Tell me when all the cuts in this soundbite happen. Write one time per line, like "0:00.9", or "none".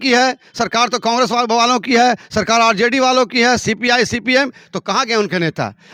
none

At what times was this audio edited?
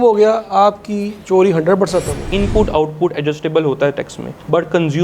0:02.3

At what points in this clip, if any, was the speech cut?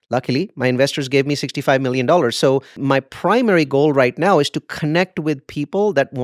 0:02.8

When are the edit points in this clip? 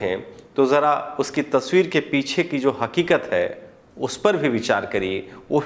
none

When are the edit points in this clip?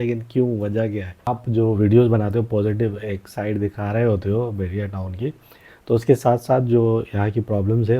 0:01.3

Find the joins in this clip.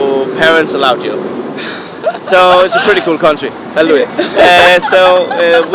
none

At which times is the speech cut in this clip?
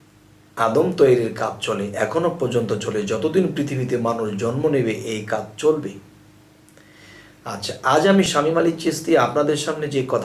0:08.3

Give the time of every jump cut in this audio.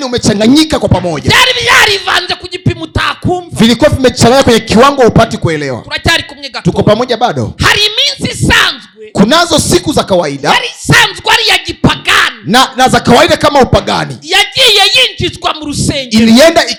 none

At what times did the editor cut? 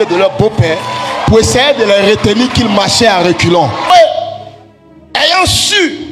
0:03.9

